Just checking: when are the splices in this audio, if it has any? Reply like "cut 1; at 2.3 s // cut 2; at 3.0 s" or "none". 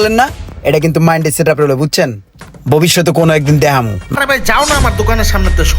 cut 1; at 4.2 s